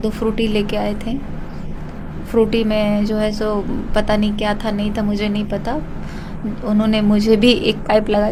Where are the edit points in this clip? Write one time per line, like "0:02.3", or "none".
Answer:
none